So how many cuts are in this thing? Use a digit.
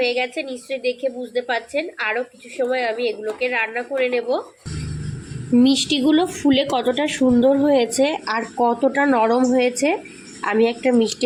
0